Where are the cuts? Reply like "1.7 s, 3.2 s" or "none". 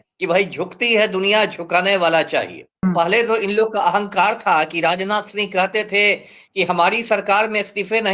2.8 s